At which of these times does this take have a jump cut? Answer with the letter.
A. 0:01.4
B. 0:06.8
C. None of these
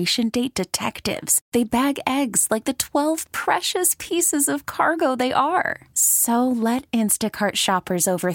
C